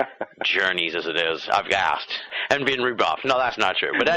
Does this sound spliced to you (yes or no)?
yes